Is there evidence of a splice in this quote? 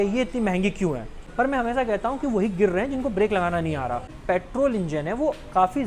yes; 2 cuts; at 1.1 s, 4.1 s

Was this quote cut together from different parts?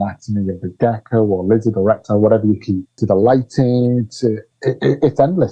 yes; 2 cuts; at 3.0 s, 4.5 s

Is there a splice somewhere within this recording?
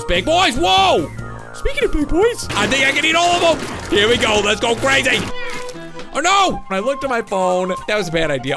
yes; 4 cuts; at 2.5 s, 5.4 s, 6.7 s, 7.8 s

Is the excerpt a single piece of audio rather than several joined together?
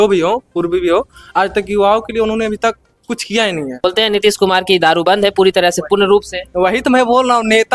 no; 1 cut; at 3.8 s

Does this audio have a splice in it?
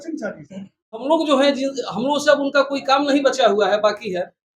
yes; 1 cut; at 1.0 s

